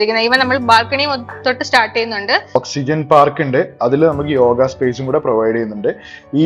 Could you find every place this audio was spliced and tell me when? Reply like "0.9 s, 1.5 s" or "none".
2.5 s